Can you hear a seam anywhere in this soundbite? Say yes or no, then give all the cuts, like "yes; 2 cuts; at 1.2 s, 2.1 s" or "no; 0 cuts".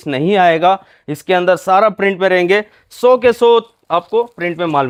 no; 0 cuts